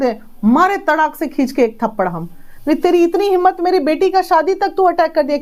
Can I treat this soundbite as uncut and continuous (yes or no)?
yes